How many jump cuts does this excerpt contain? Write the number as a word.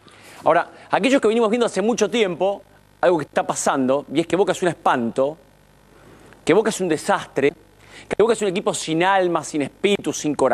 zero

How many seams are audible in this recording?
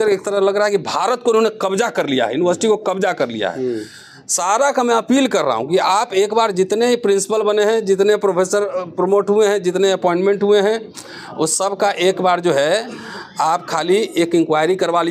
zero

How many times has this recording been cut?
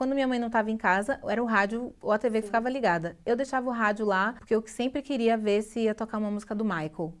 one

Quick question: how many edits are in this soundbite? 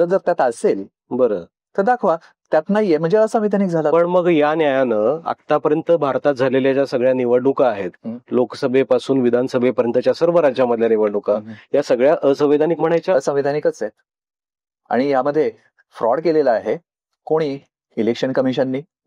zero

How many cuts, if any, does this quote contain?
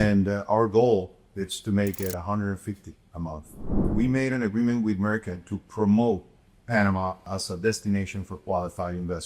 two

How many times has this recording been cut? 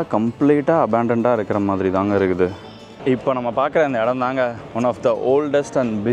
one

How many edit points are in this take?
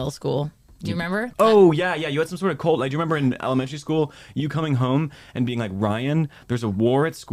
one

